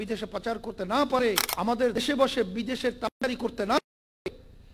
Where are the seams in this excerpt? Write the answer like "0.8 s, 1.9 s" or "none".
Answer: 1.5 s